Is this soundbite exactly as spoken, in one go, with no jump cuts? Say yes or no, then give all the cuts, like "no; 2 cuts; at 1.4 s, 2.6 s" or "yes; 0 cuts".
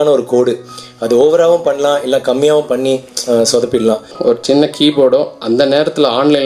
no; 1 cut; at 4.1 s